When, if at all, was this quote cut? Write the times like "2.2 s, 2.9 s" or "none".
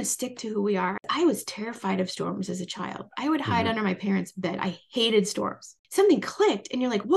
1.1 s, 5.8 s